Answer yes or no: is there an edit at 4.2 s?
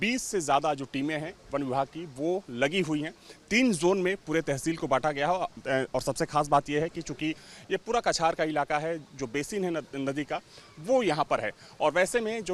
no